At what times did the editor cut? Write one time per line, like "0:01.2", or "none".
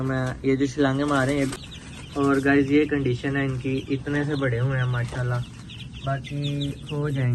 0:01.6